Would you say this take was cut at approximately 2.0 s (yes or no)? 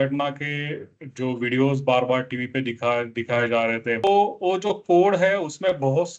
no